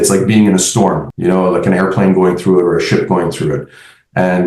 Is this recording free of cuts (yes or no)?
no